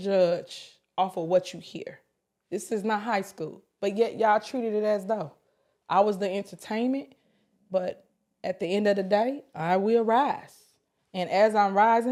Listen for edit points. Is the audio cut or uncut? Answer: uncut